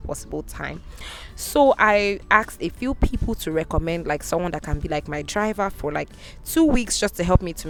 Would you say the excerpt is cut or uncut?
uncut